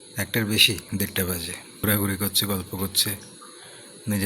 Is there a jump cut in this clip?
yes; 1 cut; at 1.8 s

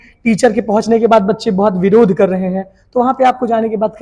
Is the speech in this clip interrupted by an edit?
no; 0 cuts

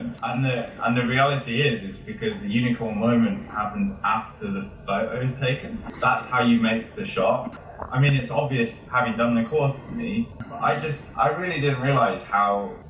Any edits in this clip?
yes; 2 cuts; at 7.5 s, 10.4 s

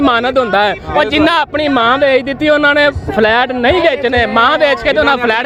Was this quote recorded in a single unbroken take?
yes; 0 cuts

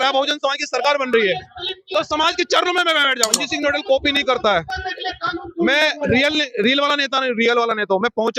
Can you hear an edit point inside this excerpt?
yes; 1 cut; at 3.3 s

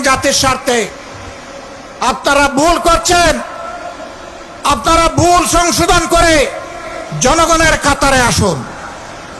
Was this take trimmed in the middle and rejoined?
no; 0 cuts

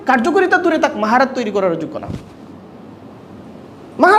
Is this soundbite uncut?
yes; 0 cuts

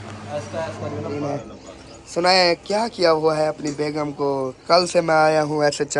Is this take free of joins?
no; 1 cut; at 1.2 s

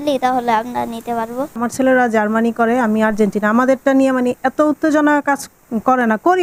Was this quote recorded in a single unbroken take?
yes; 0 cuts

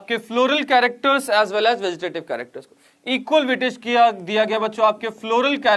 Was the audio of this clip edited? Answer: no; 0 cuts

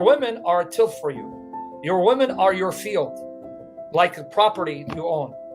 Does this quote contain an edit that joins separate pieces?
no; 0 cuts

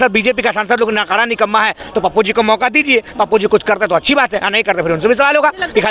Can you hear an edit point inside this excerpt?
no; 0 cuts

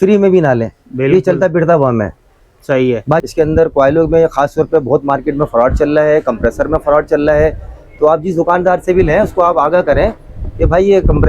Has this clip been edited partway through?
yes; 1 cut; at 3.2 s

